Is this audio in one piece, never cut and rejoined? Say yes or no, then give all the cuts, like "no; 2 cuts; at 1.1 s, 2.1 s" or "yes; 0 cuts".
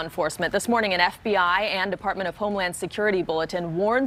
yes; 0 cuts